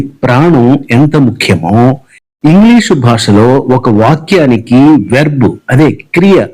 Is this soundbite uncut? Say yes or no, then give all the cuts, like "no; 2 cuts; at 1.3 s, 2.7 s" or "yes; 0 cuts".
yes; 0 cuts